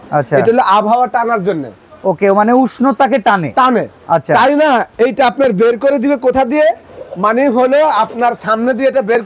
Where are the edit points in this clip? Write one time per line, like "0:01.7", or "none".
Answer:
none